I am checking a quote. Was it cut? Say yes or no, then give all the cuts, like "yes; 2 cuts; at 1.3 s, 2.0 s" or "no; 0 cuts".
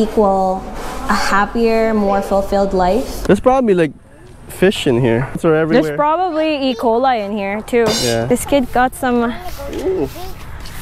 yes; 3 cuts; at 3.1 s, 5.4 s, 8.2 s